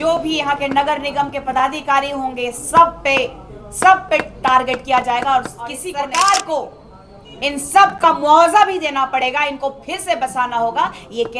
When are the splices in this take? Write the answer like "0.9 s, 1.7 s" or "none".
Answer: 5.8 s